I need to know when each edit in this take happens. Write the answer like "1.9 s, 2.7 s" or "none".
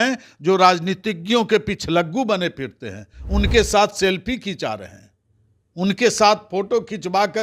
none

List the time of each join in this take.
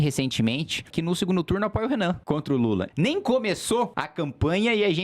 0.9 s, 2.8 s, 4.0 s

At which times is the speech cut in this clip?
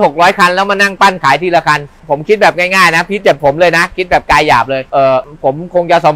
2.0 s, 4.8 s

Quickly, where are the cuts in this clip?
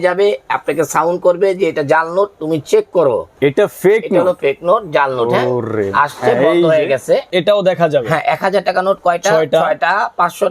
3.3 s, 7.3 s

